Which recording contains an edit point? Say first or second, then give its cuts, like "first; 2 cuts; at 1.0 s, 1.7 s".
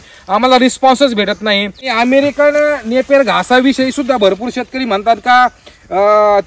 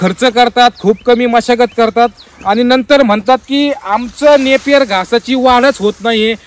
first; 1 cut; at 1.9 s